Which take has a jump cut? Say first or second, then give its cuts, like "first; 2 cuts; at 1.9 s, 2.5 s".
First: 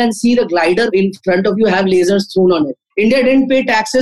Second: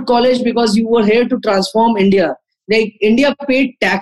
first; 2 cuts; at 0.9 s, 2.9 s